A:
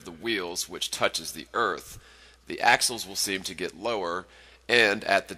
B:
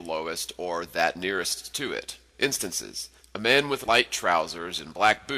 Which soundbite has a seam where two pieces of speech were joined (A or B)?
B